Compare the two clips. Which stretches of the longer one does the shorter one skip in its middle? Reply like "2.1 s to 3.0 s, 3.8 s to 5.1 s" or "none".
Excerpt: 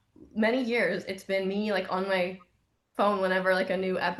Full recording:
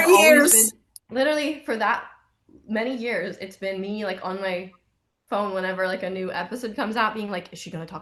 none